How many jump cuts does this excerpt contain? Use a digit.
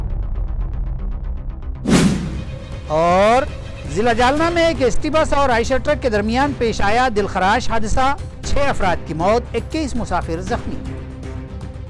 0